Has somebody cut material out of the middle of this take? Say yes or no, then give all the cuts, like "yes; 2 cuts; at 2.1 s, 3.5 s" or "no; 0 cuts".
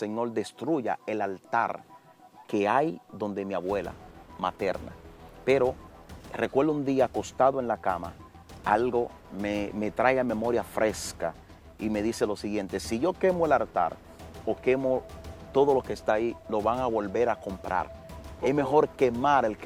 no; 0 cuts